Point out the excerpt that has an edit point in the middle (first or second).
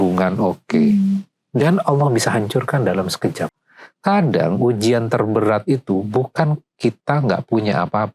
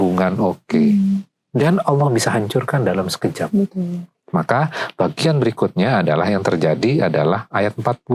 first